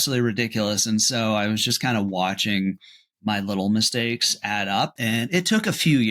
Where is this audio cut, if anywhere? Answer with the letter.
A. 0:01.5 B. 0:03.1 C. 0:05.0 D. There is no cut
C